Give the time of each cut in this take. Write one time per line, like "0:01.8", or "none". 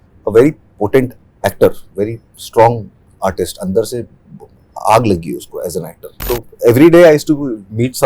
0:06.2